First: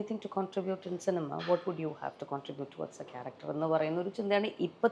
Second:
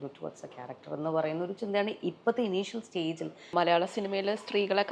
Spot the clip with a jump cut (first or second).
second